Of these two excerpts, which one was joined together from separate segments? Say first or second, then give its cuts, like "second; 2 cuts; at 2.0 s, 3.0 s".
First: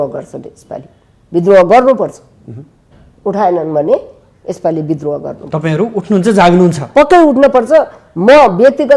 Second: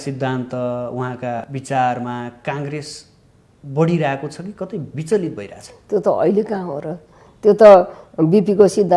second; 1 cut; at 1.5 s